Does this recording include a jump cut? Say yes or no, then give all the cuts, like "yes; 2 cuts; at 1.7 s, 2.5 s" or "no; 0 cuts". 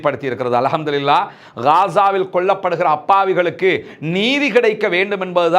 no; 0 cuts